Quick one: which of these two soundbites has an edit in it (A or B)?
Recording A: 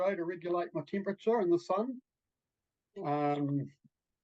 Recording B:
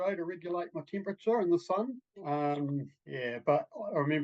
B